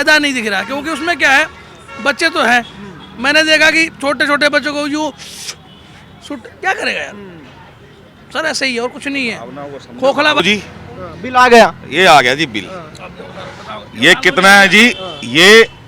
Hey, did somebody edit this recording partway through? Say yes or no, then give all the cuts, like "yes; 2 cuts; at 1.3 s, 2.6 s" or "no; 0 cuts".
yes; 1 cut; at 10.4 s